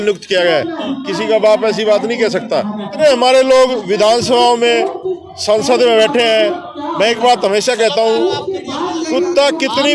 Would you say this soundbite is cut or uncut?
cut